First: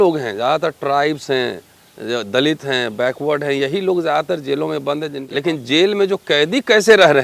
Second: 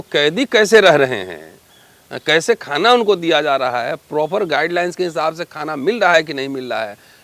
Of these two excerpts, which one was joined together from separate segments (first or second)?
first